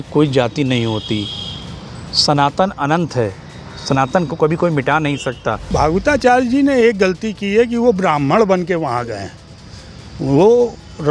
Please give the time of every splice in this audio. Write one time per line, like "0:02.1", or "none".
0:05.7